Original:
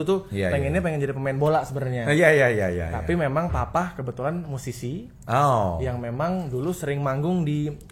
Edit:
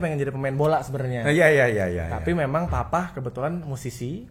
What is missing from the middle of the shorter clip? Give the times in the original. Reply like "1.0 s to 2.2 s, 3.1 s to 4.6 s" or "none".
none